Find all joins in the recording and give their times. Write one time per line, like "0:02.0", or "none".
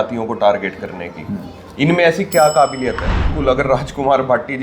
0:03.3